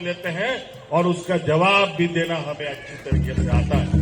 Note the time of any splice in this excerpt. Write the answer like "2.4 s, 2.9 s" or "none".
none